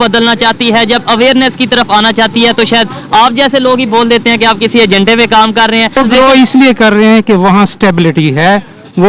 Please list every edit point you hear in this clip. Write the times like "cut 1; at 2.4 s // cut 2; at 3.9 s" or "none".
cut 1; at 6.0 s